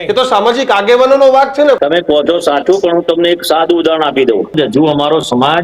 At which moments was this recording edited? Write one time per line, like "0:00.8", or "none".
0:01.8
0:04.5